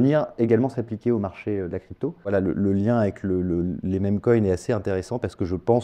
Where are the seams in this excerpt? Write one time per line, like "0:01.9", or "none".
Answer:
0:02.3